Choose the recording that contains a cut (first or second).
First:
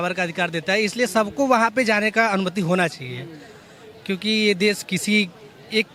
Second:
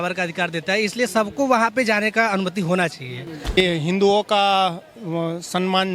second